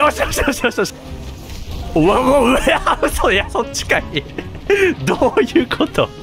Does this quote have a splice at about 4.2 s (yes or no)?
no